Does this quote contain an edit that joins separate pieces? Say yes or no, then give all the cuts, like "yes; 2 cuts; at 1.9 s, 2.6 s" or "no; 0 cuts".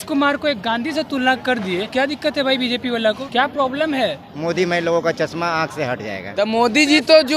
yes; 4 cuts; at 1.9 s, 3.2 s, 4.3 s, 6.2 s